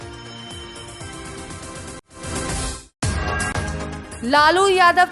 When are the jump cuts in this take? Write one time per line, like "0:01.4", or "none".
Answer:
0:02.0
0:03.9